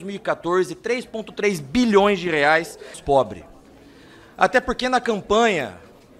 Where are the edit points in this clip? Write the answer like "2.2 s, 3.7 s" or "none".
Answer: 3.0 s